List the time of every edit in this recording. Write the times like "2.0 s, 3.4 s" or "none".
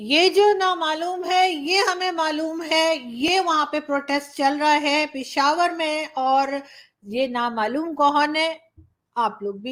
none